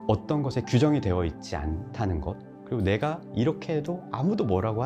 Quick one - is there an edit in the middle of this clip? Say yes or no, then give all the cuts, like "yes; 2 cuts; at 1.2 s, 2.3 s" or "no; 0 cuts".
yes; 1 cut; at 2.5 s